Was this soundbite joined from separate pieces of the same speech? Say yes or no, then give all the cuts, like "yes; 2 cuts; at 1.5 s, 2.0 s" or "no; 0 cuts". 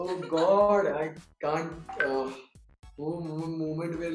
no; 0 cuts